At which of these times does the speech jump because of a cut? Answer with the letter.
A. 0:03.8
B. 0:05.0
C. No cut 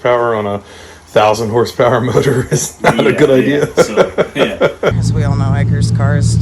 B